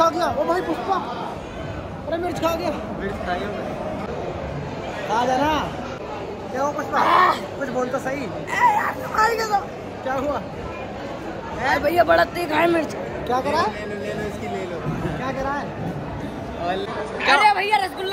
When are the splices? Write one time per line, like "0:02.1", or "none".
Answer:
none

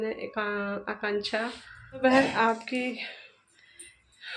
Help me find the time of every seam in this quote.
0:02.0

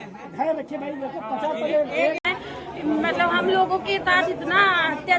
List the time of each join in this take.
0:02.3

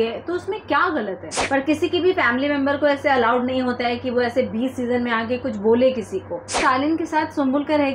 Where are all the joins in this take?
0:01.3
0:06.6

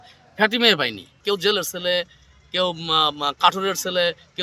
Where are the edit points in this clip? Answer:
0:01.2

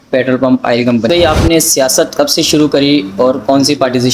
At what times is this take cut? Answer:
0:01.1

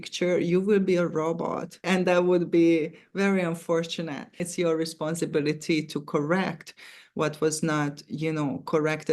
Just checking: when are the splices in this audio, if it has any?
0:01.8
0:04.5

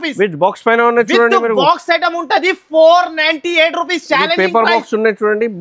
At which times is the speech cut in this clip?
none

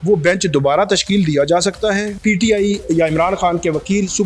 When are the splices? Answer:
0:02.1

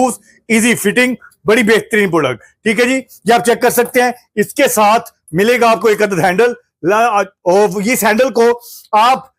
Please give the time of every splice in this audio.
none

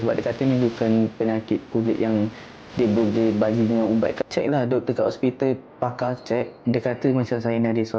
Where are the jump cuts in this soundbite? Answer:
0:04.3
0:06.6

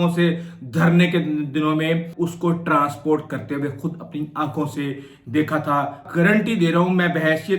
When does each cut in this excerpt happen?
0:02.1
0:06.0

